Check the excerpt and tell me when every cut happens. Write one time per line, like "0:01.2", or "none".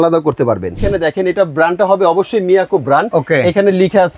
0:00.8
0:03.1